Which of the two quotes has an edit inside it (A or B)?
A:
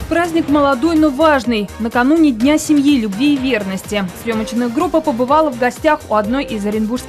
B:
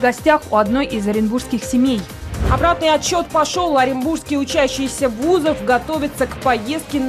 B